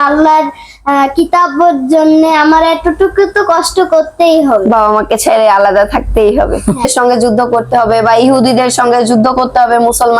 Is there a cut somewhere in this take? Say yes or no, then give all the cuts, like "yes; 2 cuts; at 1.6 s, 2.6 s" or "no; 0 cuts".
yes; 1 cut; at 6.8 s